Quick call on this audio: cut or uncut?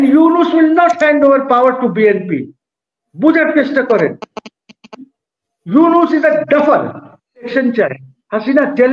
cut